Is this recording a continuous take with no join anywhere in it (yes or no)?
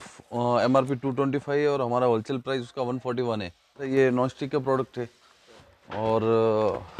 no